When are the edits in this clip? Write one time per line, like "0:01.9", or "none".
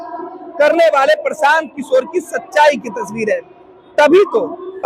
none